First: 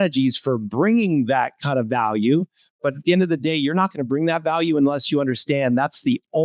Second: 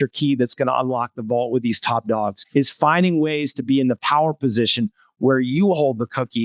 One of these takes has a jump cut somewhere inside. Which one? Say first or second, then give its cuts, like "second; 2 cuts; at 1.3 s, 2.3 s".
second; 1 cut; at 2.4 s